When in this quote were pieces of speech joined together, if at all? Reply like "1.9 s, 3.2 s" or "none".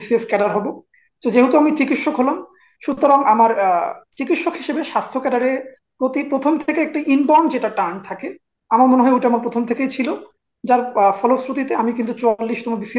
none